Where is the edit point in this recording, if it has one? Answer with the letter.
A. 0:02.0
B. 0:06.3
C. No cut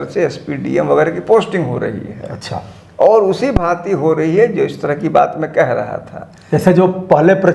C